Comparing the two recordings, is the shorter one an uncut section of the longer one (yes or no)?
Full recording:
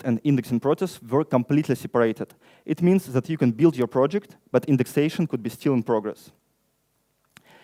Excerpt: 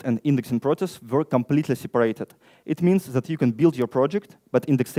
yes